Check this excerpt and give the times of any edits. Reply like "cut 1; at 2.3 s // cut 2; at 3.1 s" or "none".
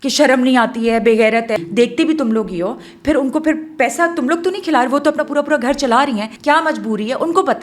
cut 1; at 1.6 s // cut 2; at 6.3 s